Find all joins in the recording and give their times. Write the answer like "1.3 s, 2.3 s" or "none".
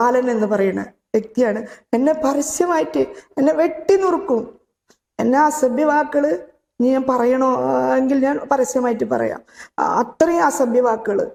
none